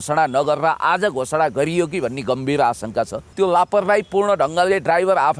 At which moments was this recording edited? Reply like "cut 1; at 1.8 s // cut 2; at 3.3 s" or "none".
cut 1; at 3.3 s